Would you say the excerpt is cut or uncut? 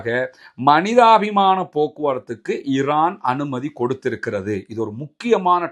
uncut